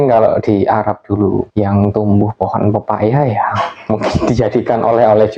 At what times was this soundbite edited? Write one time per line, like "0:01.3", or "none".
0:01.5